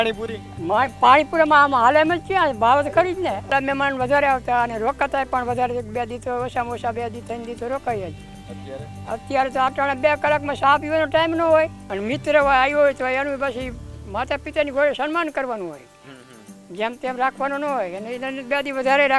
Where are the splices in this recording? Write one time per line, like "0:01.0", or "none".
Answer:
0:03.5
0:11.8